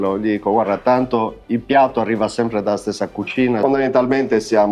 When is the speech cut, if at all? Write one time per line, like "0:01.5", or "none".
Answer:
0:03.6